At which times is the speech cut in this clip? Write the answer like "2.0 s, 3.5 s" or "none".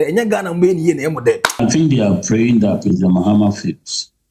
1.6 s